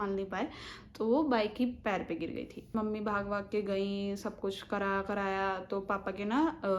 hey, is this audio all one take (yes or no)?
yes